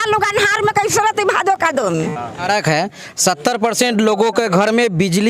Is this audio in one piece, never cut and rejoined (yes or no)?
no